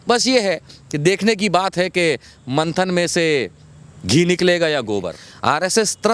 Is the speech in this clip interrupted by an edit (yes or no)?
yes